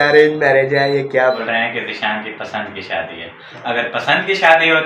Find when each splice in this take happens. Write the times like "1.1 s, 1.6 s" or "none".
1.4 s

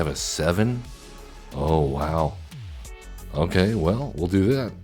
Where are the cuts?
none

